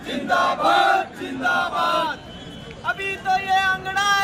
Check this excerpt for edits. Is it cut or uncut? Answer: uncut